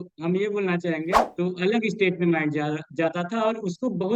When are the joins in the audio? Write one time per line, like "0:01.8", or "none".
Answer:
0:01.3